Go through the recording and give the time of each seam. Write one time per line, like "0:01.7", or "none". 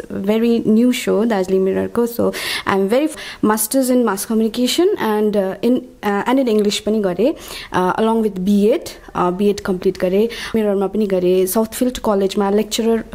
0:03.1
0:10.5